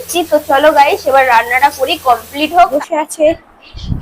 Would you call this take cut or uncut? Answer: cut